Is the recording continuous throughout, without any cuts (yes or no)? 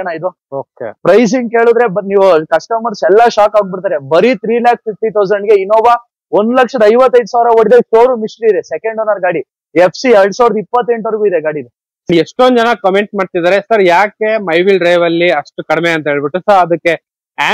no